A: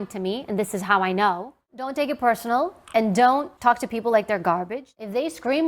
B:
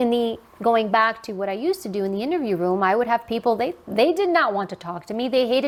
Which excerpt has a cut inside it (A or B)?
A